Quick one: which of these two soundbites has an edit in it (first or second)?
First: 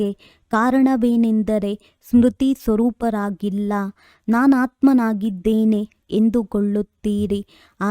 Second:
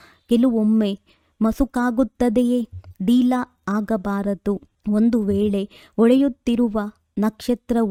first